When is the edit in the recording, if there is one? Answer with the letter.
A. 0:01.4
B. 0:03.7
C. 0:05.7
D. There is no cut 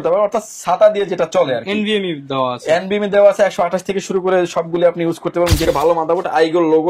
C